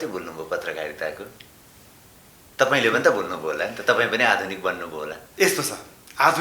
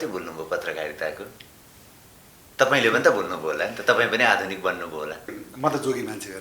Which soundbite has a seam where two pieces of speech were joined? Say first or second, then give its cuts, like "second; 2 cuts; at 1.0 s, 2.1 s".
second; 1 cut; at 5.3 s